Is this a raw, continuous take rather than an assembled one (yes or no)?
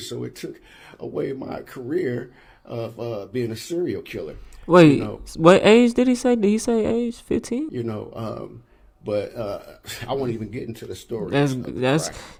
yes